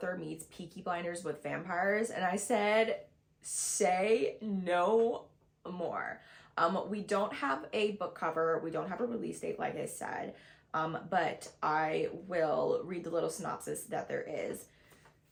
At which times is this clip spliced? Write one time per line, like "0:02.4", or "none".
none